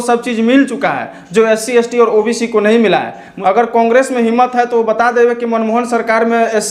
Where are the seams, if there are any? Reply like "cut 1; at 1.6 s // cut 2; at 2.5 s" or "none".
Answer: cut 1; at 3.2 s

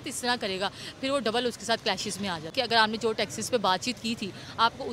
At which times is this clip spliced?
cut 1; at 2.5 s

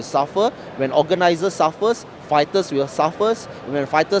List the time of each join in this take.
none

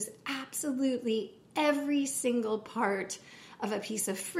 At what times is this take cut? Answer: none

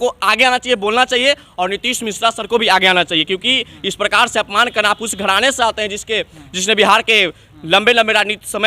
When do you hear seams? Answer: none

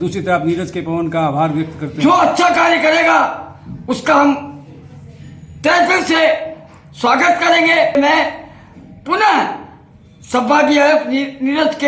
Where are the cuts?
cut 1; at 8.0 s

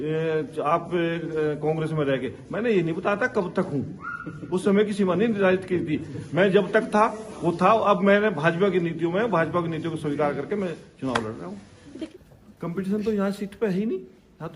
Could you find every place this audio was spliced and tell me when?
cut 1; at 12.1 s

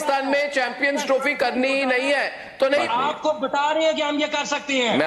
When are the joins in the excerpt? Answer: cut 1; at 2.8 s

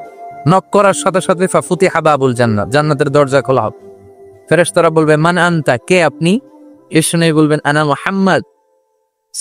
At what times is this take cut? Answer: none

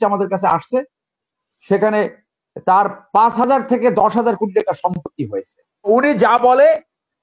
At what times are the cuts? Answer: cut 1; at 5.9 s

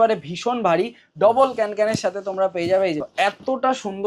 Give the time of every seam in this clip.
cut 1; at 3.0 s

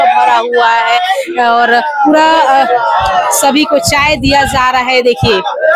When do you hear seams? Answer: none

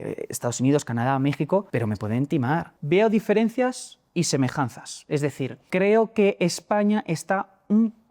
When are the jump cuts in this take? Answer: cut 1; at 1.7 s // cut 2; at 2.7 s // cut 3; at 5.6 s

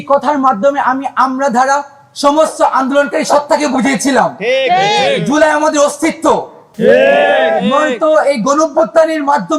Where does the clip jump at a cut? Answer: cut 1; at 6.6 s

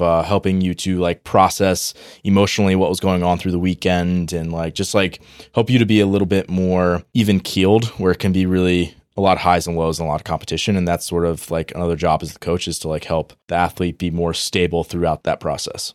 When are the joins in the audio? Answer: cut 1; at 7.0 s // cut 2; at 13.4 s // cut 3; at 15.2 s

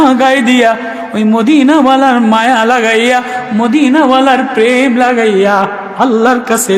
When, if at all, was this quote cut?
none

